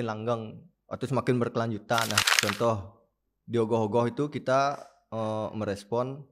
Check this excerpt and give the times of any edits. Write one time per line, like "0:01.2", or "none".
0:02.2